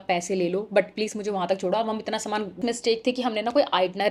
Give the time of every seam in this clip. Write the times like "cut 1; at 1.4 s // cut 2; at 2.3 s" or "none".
cut 1; at 2.6 s